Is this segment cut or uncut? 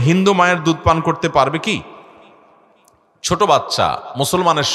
uncut